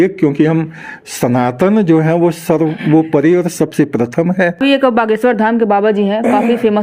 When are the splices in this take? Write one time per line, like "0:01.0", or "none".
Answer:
0:04.6